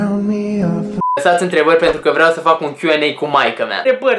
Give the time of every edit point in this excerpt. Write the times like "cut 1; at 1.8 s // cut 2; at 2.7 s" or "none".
cut 1; at 1.0 s

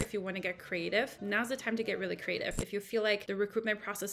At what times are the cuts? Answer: cut 1; at 1.2 s // cut 2; at 3.2 s

